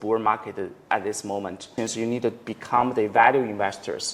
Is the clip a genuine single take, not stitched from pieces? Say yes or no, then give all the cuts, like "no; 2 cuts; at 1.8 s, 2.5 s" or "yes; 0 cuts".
no; 1 cut; at 1.7 s